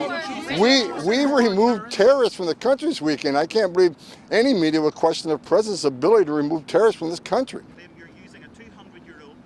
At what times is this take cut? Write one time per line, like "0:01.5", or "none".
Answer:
0:07.7